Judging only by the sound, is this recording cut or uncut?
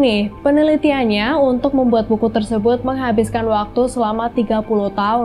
uncut